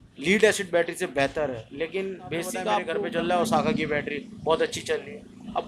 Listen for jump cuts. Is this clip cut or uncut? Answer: cut